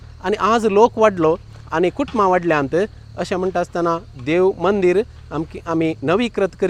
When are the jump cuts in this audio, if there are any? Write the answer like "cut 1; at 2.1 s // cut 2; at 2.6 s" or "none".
none